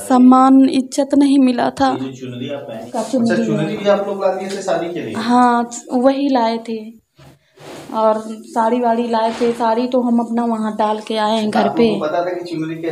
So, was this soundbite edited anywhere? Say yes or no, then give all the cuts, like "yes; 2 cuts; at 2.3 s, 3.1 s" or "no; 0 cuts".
yes; 1 cut; at 2.8 s